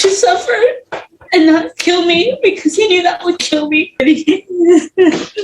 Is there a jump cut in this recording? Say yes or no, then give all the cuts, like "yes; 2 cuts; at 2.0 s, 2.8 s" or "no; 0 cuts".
yes; 1 cut; at 4.0 s